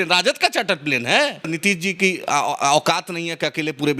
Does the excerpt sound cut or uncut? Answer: cut